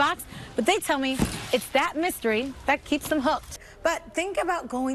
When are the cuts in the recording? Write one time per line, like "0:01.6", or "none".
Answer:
0:03.6